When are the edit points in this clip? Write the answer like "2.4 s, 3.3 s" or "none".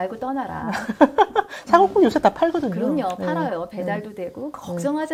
none